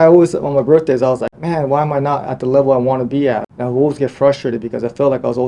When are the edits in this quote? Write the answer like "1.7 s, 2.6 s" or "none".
3.5 s